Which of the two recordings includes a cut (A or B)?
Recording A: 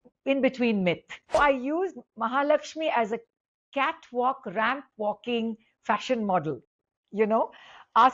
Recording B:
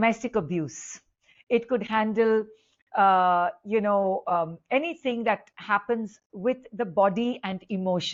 A